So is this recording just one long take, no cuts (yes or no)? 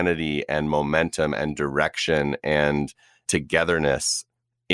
no